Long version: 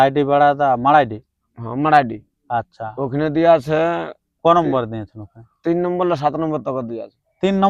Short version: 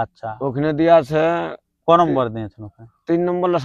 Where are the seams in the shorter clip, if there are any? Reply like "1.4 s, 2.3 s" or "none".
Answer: none